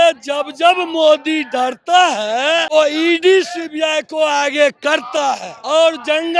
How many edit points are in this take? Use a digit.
2